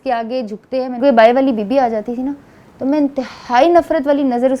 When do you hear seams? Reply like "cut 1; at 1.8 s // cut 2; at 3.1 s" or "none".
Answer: cut 1; at 1.0 s